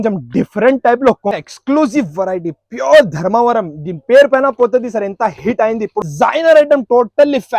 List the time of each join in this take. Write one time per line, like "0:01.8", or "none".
0:01.3
0:06.0

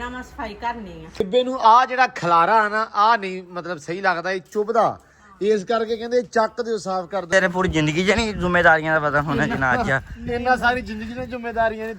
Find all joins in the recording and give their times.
0:01.2
0:07.3

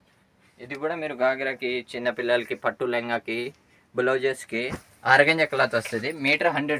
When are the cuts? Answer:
0:04.9

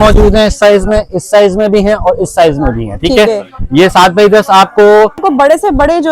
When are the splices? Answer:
0:05.2

